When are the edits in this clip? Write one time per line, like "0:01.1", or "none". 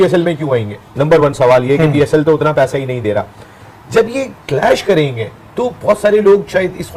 none